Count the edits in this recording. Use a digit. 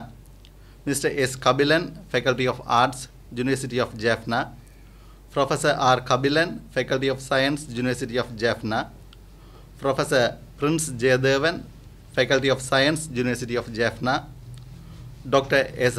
0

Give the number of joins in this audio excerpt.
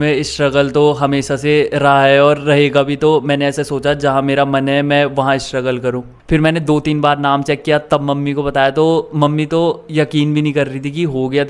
1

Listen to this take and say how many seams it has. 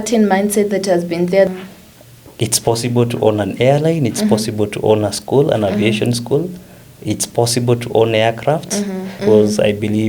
2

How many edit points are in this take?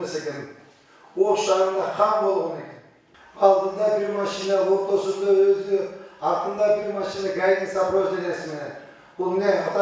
0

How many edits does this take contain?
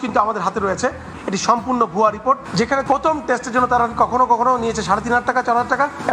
1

